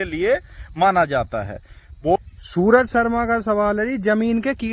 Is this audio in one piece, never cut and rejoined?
no; 1 cut; at 2.2 s

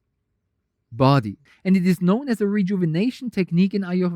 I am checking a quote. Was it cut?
yes; 1 cut; at 1.4 s

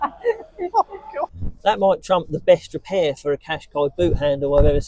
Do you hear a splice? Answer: yes; 1 cut; at 1.4 s

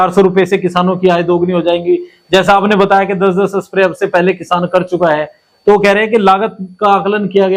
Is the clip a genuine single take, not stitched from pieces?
yes; 0 cuts

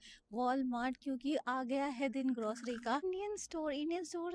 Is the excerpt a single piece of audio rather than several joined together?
no; 1 cut; at 3.0 s

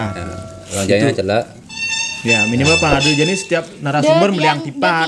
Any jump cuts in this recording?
no; 0 cuts

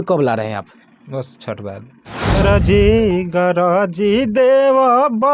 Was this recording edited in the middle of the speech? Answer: yes; 1 cut; at 2.4 s

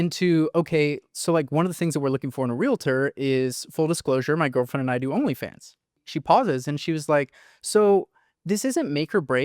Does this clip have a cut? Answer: yes; 1 cut; at 6.1 s

